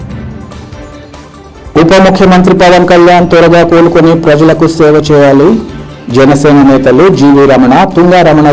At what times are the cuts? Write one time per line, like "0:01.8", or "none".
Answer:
none